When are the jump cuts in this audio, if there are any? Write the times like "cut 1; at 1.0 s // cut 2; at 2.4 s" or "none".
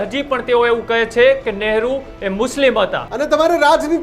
cut 1; at 3.0 s